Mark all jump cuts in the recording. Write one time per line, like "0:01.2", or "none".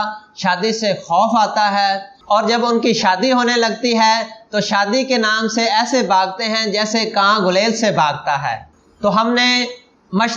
0:08.6